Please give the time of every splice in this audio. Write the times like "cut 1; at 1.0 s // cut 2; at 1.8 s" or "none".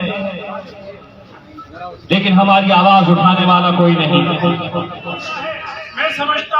cut 1; at 5.4 s